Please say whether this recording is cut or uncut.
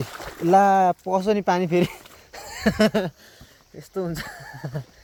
uncut